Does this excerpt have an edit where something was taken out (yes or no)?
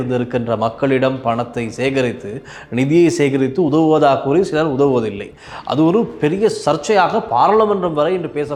no